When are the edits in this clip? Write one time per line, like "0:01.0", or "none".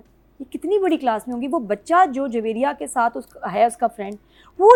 none